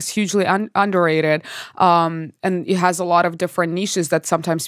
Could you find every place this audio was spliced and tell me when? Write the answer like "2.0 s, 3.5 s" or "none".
none